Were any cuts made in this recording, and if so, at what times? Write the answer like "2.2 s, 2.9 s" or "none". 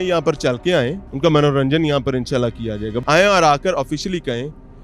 1.0 s, 2.9 s